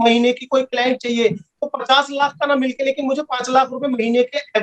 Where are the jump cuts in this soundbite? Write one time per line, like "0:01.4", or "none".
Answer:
none